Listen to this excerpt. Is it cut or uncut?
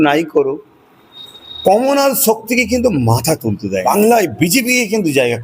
cut